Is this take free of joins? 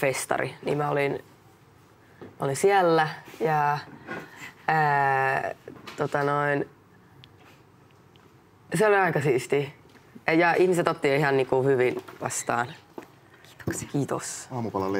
yes; 0 cuts

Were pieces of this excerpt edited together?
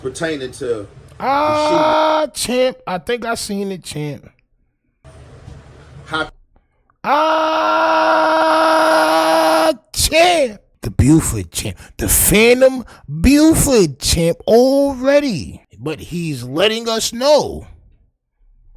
yes; 1 cut; at 1.0 s

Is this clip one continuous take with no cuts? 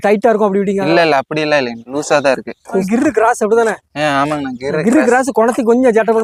yes; 0 cuts

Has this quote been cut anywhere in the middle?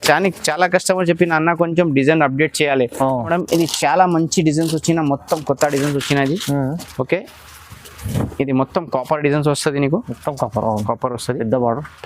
yes; 1 cut; at 3.3 s

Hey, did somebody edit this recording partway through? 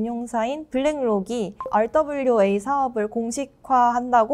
yes; 1 cut; at 1.6 s

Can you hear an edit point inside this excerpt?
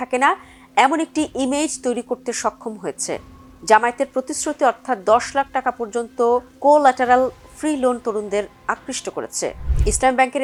no; 0 cuts

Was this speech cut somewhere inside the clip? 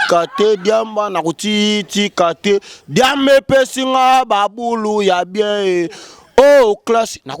no; 0 cuts

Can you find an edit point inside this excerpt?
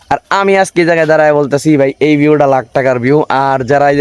no; 0 cuts

